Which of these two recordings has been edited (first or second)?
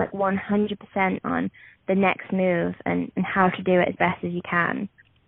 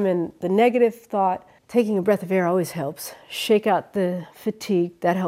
second